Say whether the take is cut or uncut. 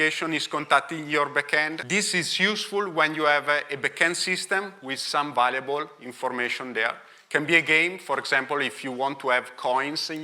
cut